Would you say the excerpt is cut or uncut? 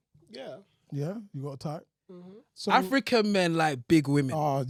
uncut